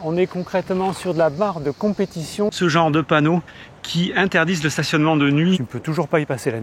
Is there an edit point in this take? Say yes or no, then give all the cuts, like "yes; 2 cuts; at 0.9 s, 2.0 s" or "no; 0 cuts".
yes; 2 cuts; at 2.6 s, 5.6 s